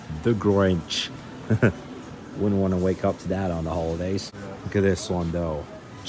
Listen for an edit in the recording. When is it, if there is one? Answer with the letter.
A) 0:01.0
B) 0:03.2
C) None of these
C